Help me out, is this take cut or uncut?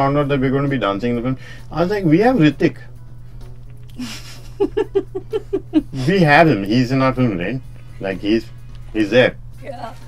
uncut